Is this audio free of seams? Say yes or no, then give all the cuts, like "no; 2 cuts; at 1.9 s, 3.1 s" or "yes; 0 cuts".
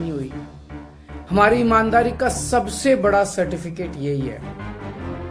no; 1 cut; at 4.4 s